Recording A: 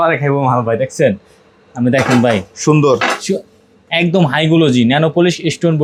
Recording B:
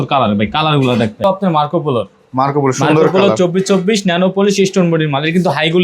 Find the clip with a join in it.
B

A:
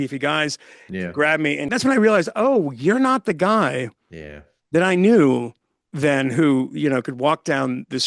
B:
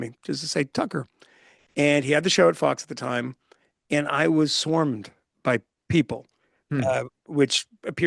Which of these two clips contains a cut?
A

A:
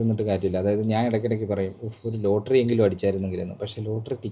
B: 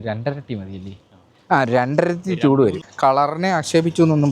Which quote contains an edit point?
B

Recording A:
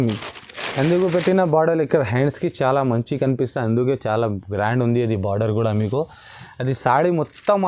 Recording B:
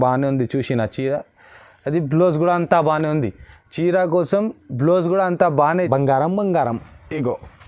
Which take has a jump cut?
B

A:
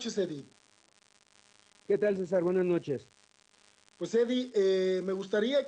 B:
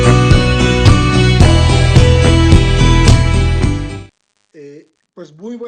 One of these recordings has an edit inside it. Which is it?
A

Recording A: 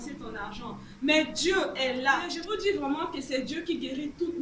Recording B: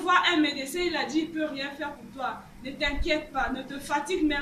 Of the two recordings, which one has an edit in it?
A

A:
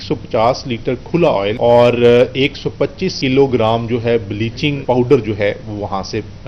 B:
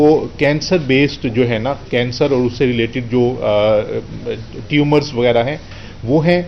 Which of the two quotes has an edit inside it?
A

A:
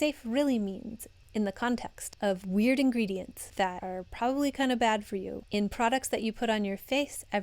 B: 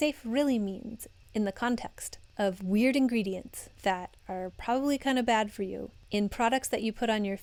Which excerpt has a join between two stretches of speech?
A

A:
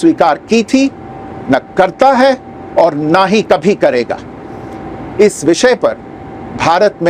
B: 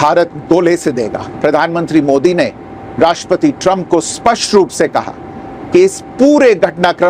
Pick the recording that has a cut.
B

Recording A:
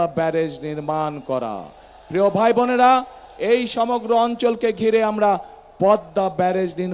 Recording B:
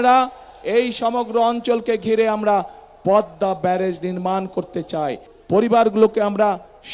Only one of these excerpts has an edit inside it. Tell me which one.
B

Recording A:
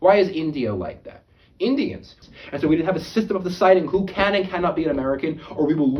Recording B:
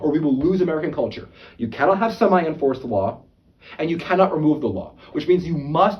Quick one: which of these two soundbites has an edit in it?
A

